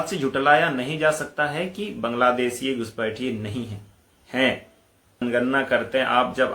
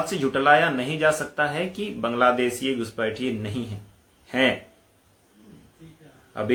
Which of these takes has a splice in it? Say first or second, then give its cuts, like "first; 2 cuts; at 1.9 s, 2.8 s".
first; 1 cut; at 5.2 s